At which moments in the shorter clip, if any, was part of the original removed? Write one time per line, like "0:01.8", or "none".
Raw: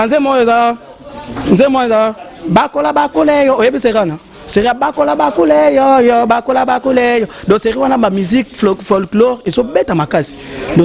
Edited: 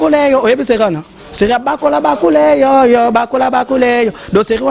none